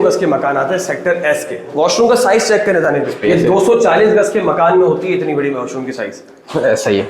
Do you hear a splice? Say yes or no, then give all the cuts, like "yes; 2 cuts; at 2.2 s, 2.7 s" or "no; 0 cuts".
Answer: yes; 2 cuts; at 1.7 s, 3.1 s